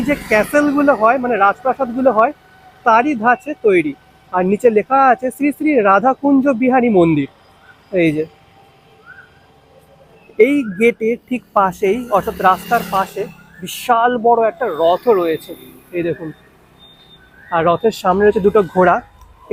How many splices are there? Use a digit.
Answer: 0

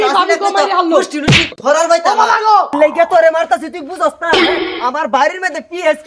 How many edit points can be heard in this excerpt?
1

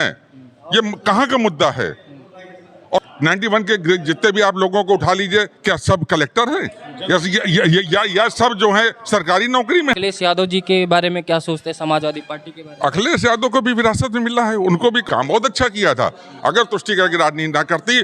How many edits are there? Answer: 3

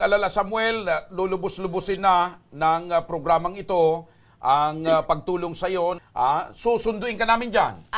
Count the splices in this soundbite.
1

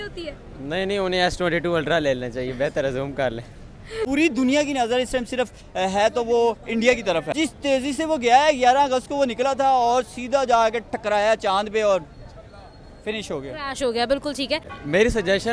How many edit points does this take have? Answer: 3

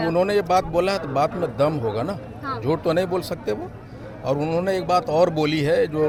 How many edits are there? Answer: 0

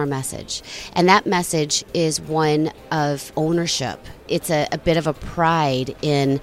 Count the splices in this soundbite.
2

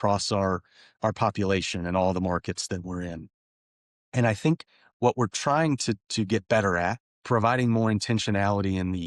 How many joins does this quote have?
1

